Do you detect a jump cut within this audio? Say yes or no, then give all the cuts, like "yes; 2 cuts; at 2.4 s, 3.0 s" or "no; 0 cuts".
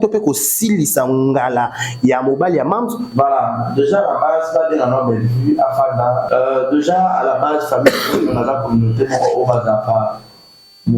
yes; 2 cuts; at 3.1 s, 6.2 s